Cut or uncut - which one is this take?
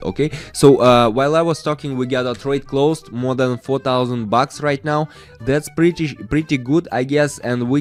uncut